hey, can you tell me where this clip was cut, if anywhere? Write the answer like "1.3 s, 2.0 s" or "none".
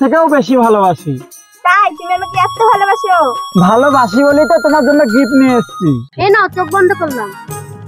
6.1 s